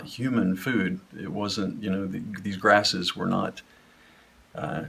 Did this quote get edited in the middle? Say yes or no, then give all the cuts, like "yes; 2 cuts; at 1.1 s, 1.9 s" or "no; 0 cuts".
no; 0 cuts